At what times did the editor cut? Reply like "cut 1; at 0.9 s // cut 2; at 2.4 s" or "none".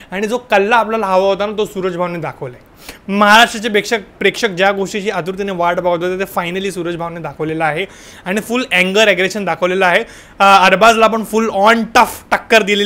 none

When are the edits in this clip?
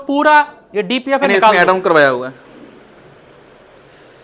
cut 1; at 1.5 s

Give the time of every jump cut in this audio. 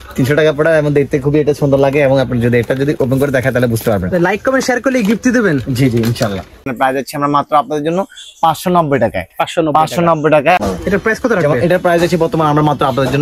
cut 1; at 6.7 s // cut 2; at 10.6 s

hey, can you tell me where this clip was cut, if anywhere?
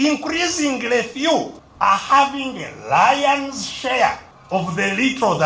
cut 1; at 1.6 s // cut 2; at 4.3 s

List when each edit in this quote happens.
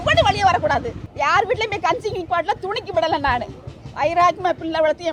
cut 1; at 1.0 s

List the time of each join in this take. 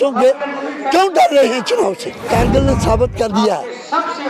cut 1; at 2.2 s

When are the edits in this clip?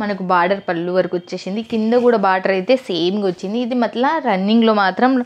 none

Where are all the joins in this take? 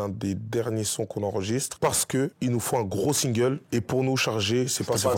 none

